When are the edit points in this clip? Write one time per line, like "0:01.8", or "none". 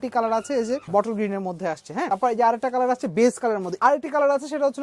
0:00.8
0:02.1
0:03.7